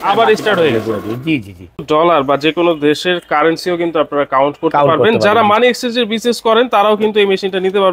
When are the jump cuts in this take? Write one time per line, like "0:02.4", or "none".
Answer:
0:01.8